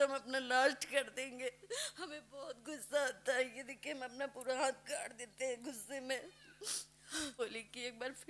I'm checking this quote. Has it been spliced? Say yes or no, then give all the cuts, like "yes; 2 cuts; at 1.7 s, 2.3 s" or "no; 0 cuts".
yes; 1 cut; at 7.4 s